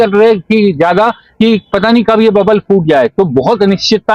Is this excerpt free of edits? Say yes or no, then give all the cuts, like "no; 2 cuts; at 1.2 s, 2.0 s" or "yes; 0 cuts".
yes; 0 cuts